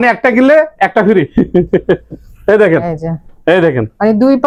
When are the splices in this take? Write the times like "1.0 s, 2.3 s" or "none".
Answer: none